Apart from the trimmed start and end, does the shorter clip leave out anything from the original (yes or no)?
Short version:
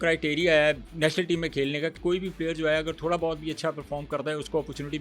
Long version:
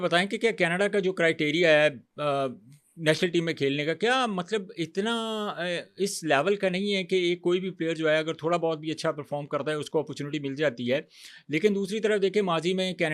yes